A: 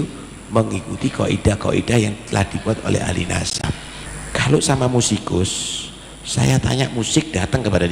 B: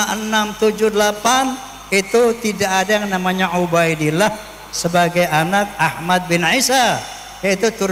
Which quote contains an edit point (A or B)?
A